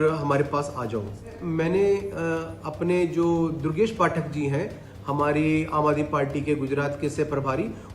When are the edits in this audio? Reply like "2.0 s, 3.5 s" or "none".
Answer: 1.4 s